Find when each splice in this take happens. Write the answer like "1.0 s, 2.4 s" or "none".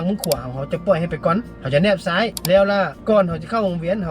1.5 s, 3.0 s